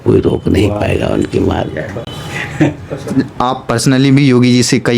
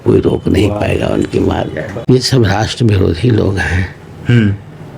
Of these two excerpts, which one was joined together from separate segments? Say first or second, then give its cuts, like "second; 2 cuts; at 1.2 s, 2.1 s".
second; 1 cut; at 1.9 s